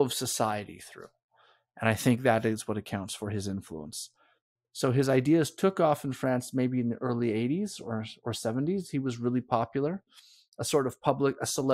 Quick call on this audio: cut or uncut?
uncut